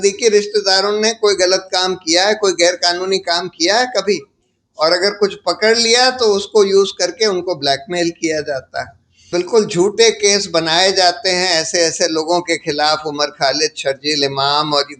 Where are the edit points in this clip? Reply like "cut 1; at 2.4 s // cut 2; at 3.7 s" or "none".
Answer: cut 1; at 9.2 s

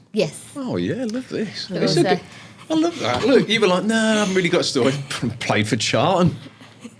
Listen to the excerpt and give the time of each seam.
none

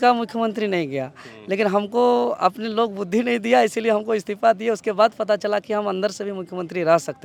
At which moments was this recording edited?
none

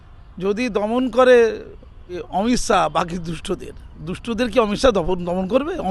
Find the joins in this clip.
cut 1; at 2.2 s

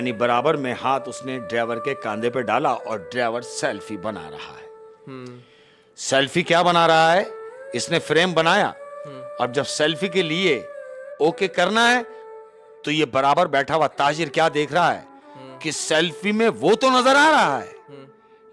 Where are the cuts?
none

